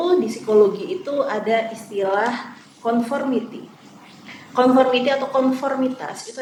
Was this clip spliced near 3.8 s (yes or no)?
no